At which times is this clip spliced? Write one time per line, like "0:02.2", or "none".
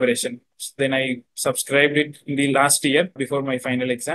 0:03.2